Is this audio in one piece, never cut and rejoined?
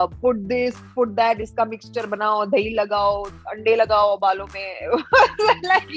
yes; 0 cuts

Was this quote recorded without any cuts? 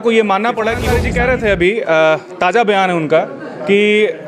no; 1 cut; at 1.0 s

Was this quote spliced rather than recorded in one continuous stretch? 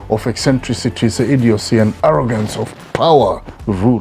no; 0 cuts

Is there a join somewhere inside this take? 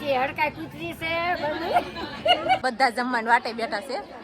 yes; 1 cut; at 2.6 s

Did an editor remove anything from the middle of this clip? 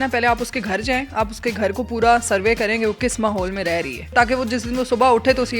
yes; 1 cut; at 4.1 s

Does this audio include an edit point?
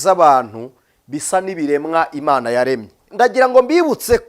yes; 1 cut; at 3.1 s

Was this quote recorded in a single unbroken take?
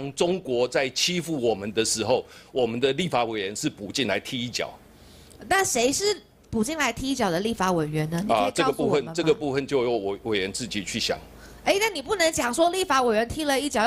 yes; 0 cuts

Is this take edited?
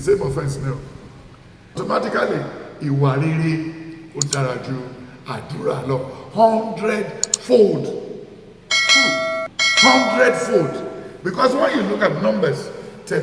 yes; 1 cut; at 1.8 s

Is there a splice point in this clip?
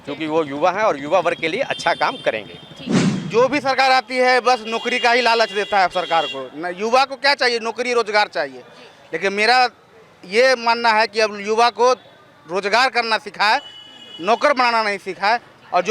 yes; 1 cut; at 3.1 s

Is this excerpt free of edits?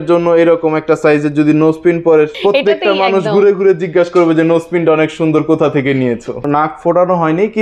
no; 2 cuts; at 2.3 s, 6.4 s

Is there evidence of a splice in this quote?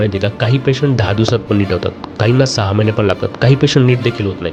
no; 0 cuts

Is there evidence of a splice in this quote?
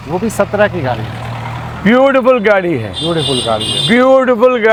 no; 0 cuts

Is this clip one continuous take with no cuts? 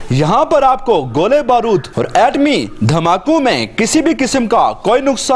yes; 0 cuts

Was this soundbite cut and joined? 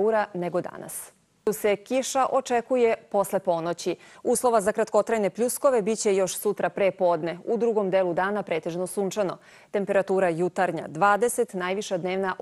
yes; 1 cut; at 4.1 s

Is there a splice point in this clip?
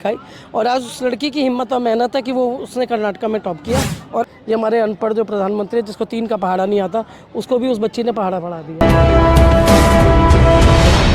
yes; 2 cuts; at 4.3 s, 8.8 s

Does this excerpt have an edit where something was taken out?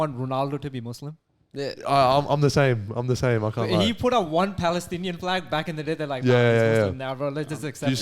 no; 0 cuts

